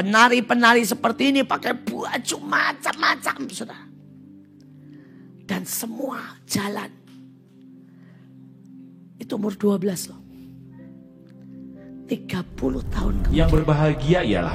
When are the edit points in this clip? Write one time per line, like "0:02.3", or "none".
0:13.3